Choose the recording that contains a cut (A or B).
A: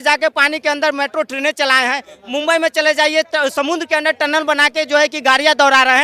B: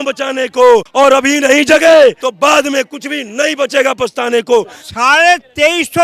B